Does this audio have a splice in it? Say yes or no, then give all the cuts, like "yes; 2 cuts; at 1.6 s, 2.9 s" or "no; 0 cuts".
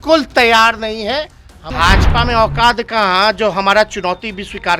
yes; 1 cut; at 1.7 s